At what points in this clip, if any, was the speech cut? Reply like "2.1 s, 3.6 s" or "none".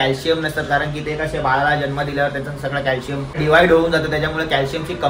3.3 s